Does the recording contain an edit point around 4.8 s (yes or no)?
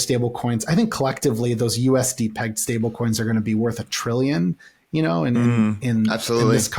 no